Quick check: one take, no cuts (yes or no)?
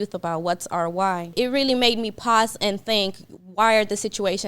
no